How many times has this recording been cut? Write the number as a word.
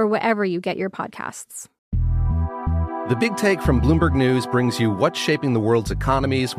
one